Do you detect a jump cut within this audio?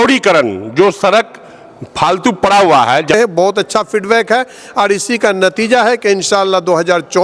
yes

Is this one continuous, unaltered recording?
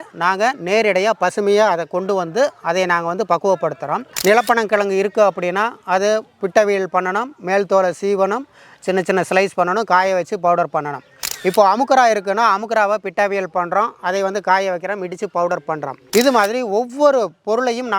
no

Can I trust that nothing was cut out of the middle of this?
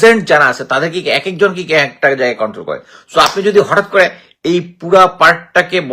yes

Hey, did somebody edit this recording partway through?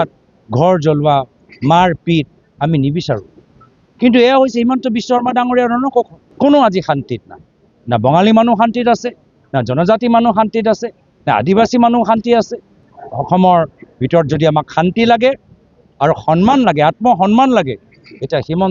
yes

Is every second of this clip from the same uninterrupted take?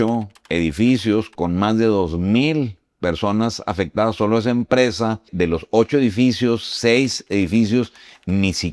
no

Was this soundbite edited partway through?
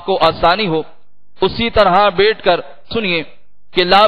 yes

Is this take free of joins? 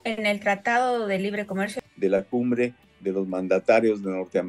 no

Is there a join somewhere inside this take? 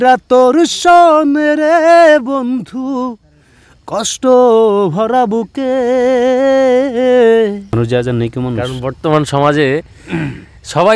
yes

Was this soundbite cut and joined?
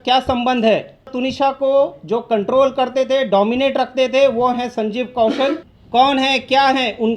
yes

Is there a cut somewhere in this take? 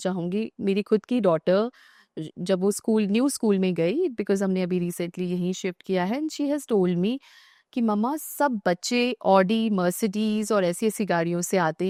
no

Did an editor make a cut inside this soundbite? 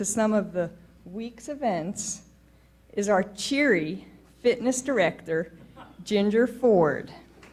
no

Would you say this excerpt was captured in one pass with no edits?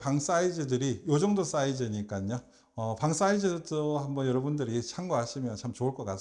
yes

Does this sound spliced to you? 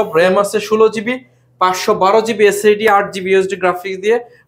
no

